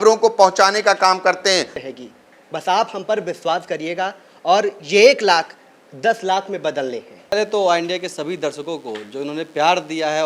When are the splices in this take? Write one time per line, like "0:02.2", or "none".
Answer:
0:01.8
0:07.3